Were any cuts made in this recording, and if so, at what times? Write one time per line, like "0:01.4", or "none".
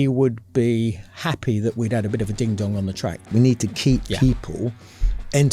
0:03.2